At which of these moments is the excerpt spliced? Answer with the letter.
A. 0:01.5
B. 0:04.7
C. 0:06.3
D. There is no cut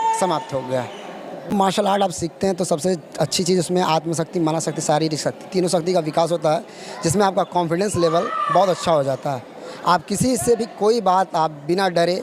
A